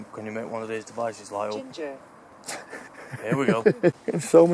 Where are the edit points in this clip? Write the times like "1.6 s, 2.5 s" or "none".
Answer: 3.6 s